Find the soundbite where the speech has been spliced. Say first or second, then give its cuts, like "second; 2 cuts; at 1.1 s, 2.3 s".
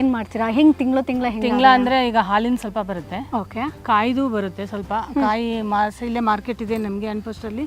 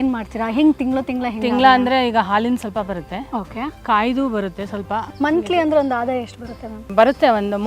second; 2 cuts; at 5.1 s, 6.9 s